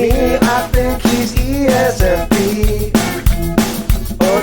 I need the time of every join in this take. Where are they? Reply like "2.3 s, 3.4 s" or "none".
none